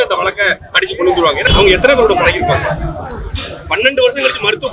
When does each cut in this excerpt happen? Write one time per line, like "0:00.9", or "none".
0:01.4